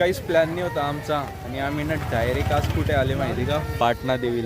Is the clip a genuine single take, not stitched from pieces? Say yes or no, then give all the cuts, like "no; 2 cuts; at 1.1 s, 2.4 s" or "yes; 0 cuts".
yes; 0 cuts